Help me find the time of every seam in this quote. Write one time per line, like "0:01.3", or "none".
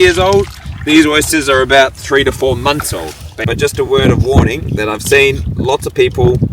0:03.5